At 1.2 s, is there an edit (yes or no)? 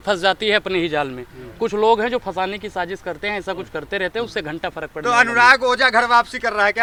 no